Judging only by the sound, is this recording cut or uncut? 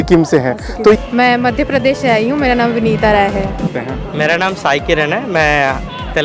cut